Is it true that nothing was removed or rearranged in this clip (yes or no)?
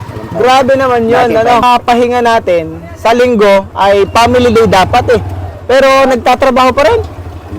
no